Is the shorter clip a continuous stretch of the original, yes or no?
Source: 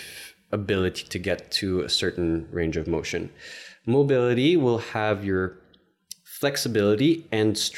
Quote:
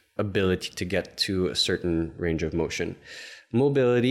yes